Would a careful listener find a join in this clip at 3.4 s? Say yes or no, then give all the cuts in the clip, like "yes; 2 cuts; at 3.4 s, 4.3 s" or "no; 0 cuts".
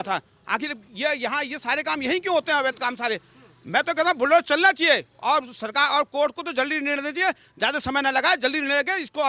no; 0 cuts